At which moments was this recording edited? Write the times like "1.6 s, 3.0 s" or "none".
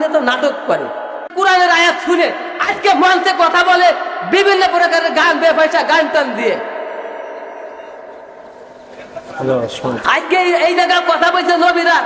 1.3 s